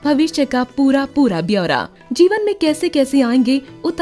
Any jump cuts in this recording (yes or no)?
no